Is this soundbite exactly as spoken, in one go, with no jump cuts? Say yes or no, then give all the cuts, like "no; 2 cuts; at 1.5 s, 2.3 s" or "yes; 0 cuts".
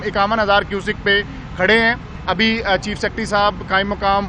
yes; 0 cuts